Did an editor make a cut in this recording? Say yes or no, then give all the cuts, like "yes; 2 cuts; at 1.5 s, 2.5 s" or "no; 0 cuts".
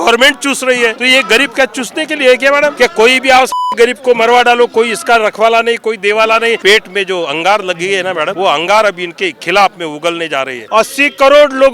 yes; 5 cuts; at 1.0 s, 2.7 s, 6.6 s, 8.3 s, 10.6 s